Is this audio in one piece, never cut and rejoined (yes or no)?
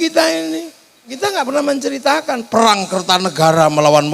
no